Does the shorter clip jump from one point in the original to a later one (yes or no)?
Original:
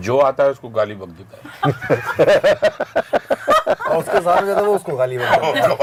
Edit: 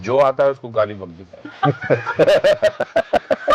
no